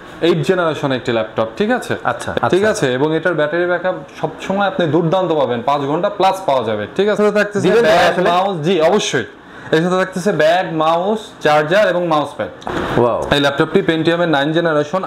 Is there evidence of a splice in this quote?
yes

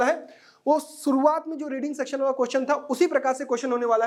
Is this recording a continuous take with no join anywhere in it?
yes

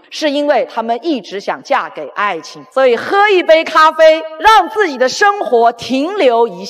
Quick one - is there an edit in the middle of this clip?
no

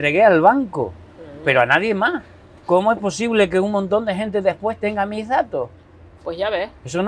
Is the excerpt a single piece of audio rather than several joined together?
yes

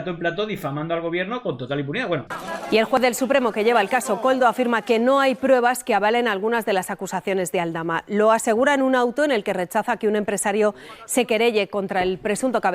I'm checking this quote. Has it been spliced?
yes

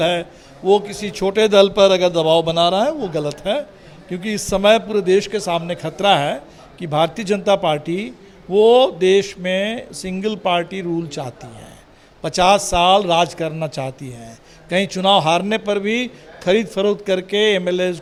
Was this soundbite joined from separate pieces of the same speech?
no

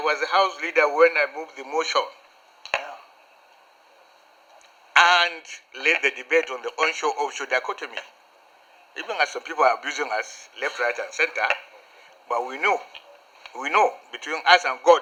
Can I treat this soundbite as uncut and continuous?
yes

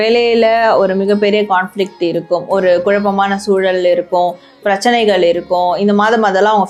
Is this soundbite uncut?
yes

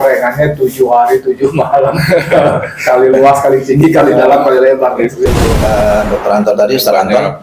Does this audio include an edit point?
yes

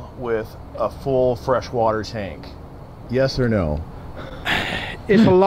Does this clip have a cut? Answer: no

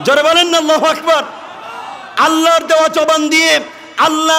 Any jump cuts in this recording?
no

